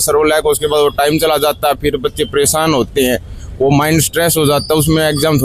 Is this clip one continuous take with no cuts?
yes; 0 cuts

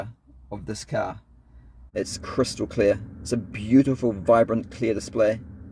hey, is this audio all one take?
no; 1 cut; at 1.8 s

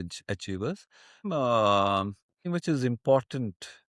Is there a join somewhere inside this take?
yes; 2 cuts; at 1.2 s, 2.5 s

